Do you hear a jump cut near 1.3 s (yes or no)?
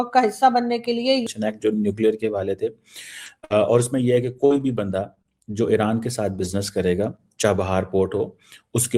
yes